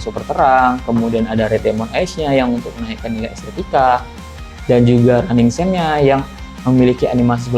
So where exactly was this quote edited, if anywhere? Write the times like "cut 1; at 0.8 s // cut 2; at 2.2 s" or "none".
none